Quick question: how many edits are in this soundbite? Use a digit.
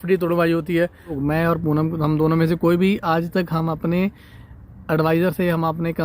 1